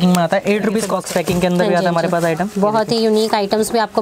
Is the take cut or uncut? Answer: cut